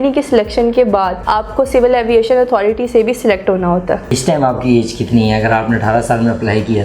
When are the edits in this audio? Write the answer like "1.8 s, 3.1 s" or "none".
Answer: 1.2 s, 4.1 s